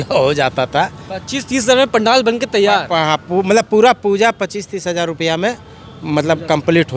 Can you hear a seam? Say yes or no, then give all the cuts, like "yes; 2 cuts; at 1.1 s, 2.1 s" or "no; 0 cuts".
no; 0 cuts